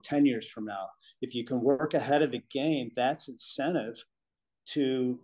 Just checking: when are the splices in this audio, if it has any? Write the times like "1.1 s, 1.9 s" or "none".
none